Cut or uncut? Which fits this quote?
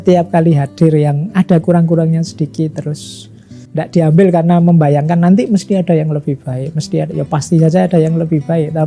uncut